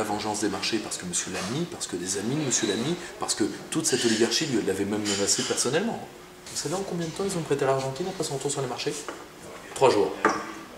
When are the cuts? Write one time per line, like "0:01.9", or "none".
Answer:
0:06.5